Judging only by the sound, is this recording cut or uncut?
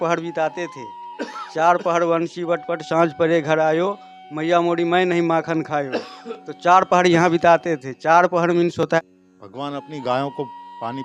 cut